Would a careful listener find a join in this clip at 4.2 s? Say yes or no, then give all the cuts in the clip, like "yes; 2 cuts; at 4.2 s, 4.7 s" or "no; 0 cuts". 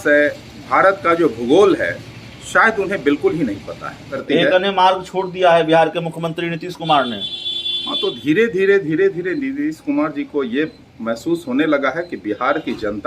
yes; 1 cut; at 4.2 s